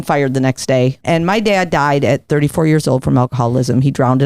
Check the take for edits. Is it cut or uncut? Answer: cut